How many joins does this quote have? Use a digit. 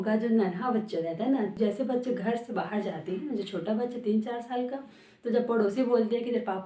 1